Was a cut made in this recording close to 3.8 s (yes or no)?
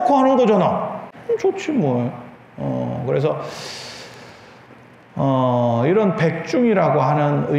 no